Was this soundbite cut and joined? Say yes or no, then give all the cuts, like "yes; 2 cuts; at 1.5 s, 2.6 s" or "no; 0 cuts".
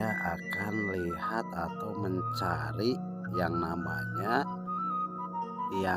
no; 0 cuts